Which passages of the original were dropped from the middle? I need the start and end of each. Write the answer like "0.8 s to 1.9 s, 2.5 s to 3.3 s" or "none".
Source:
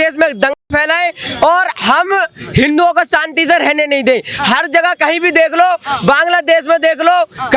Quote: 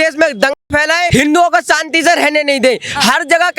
1.1 s to 2.5 s